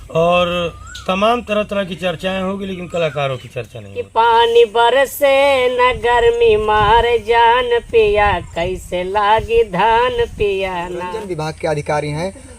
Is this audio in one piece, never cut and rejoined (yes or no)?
no